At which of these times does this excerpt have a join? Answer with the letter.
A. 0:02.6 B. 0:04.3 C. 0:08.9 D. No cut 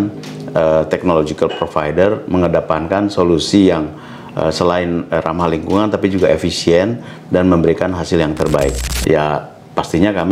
C